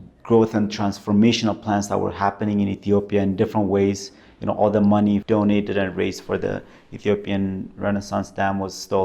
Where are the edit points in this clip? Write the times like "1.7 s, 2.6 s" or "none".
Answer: 5.2 s